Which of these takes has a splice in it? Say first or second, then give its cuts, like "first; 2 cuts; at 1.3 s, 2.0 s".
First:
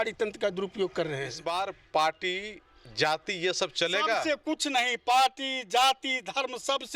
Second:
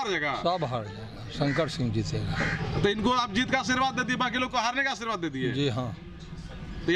first; 1 cut; at 1.3 s